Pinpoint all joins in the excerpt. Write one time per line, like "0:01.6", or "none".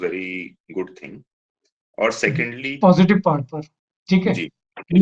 0:02.8